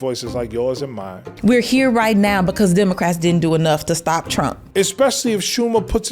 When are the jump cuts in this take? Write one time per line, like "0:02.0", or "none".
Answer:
0:01.2
0:04.6

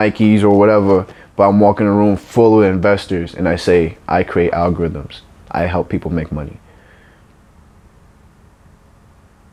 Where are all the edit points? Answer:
none

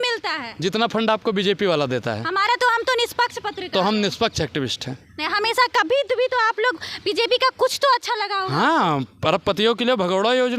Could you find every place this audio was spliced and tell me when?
none

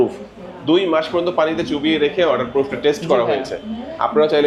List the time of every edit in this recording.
none

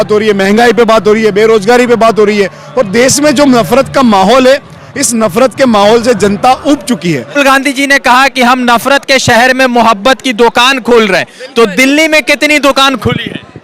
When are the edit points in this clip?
0:07.4

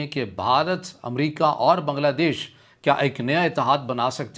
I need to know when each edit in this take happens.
none

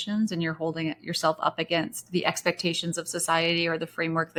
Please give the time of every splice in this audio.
none

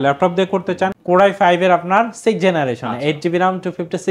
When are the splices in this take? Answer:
0:01.0

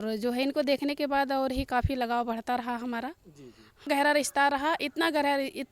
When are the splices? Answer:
0:03.8

